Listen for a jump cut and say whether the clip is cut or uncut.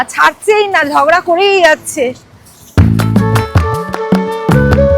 uncut